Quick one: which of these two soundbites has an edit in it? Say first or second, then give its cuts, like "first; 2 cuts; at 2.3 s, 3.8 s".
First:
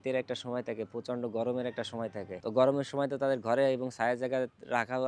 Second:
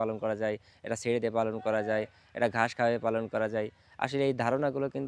first; 1 cut; at 2.3 s